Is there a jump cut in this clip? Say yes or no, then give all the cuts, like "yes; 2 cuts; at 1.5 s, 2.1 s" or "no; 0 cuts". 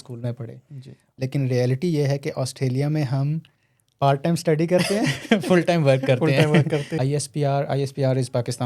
yes; 2 cuts; at 1.0 s, 6.9 s